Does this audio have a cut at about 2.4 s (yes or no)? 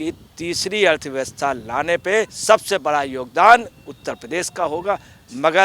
yes